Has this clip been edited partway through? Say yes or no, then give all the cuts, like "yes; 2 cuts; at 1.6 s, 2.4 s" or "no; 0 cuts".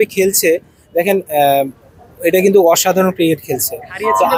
no; 0 cuts